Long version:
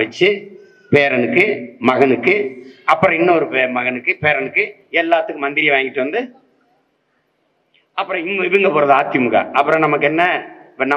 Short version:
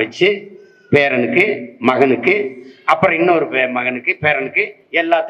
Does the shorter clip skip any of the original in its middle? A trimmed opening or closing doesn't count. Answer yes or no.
no